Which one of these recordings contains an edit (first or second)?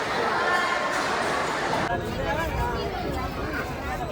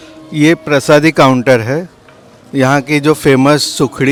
first